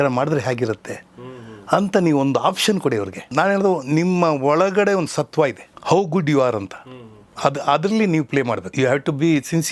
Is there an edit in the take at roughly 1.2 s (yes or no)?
no